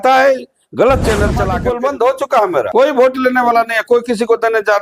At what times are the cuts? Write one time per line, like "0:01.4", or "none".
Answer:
0:01.5